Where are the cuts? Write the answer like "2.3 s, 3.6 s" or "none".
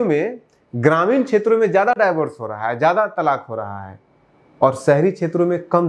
none

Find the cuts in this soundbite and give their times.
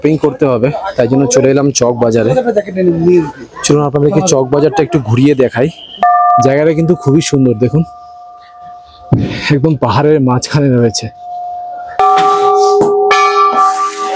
6.2 s, 11.8 s

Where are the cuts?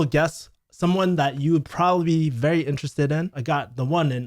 3.4 s

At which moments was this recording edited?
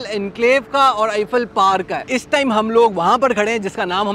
2.0 s

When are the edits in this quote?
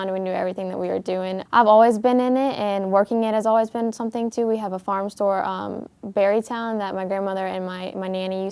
1.4 s

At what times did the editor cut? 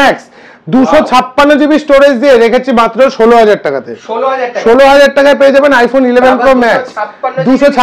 none

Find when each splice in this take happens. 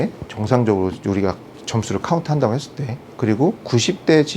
none

